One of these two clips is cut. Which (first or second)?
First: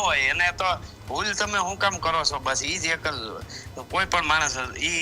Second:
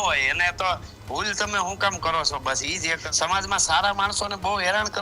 second